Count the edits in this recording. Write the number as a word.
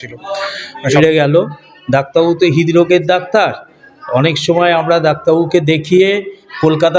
one